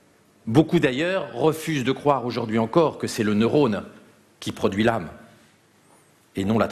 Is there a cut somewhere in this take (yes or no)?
no